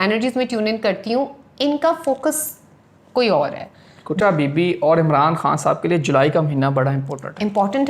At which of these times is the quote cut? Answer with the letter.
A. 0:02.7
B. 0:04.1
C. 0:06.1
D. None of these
B